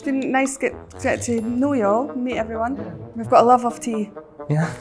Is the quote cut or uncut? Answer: uncut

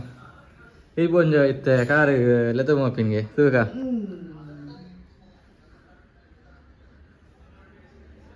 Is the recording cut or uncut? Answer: uncut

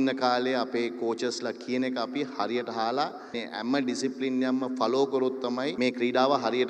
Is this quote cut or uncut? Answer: cut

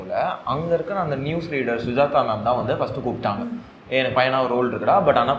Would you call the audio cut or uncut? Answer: uncut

